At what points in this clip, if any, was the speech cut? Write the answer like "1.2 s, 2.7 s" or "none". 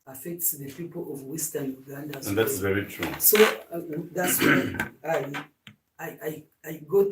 none